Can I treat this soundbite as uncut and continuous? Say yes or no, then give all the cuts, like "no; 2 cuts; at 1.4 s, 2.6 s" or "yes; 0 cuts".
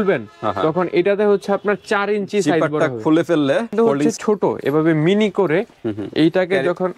no; 1 cut; at 3.7 s